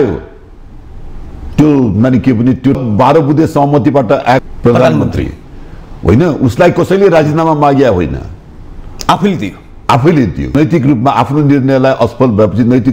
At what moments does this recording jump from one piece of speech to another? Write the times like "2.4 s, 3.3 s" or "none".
2.8 s, 4.4 s, 10.5 s